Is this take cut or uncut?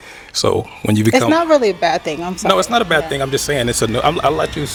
uncut